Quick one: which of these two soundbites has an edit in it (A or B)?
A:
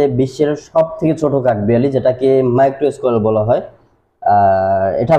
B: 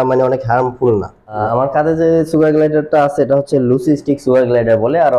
B